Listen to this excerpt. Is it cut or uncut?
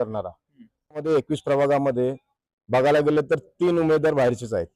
cut